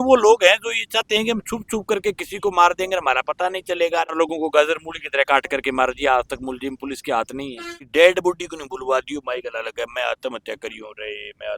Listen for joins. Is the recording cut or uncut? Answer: cut